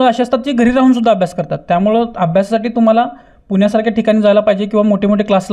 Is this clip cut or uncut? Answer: uncut